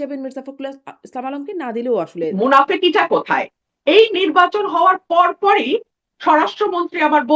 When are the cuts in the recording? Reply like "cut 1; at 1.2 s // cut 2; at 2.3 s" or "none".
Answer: cut 1; at 2.3 s